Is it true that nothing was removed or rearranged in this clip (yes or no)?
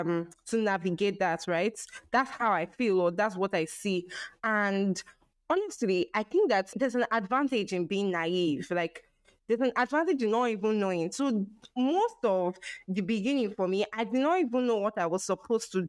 no